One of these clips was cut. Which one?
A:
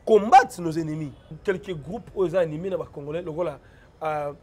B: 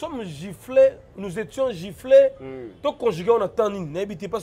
A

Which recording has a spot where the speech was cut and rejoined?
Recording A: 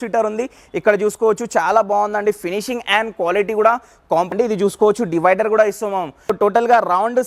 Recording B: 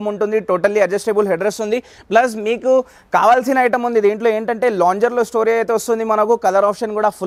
A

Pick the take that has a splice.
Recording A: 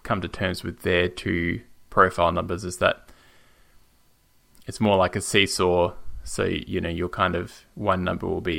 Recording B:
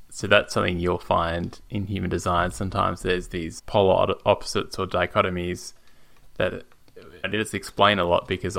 B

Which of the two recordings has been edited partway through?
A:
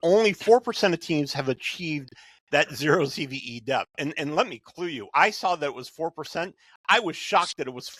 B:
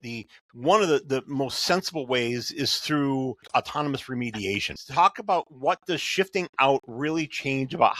B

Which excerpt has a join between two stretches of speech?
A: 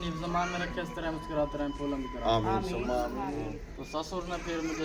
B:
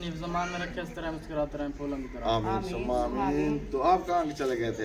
A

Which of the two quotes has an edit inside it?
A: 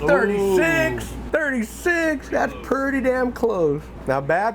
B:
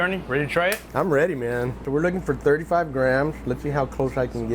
B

